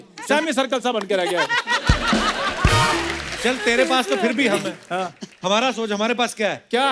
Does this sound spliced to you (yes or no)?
yes